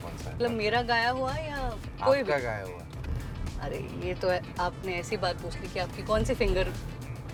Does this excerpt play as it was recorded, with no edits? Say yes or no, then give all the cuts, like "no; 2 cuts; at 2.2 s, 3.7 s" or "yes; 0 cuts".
yes; 0 cuts